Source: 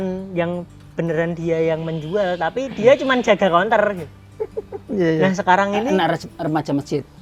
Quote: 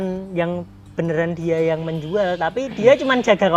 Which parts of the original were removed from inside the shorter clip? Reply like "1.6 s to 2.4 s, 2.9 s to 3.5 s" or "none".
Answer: none